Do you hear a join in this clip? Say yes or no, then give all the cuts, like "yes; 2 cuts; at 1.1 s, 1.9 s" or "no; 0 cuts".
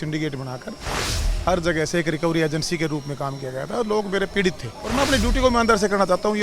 yes; 1 cut; at 4.8 s